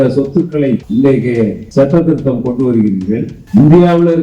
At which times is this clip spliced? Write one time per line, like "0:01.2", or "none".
0:00.9
0:01.6
0:03.4